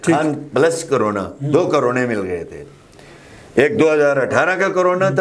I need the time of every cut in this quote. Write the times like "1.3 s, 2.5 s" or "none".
none